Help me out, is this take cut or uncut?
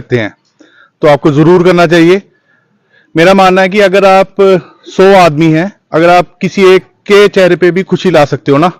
uncut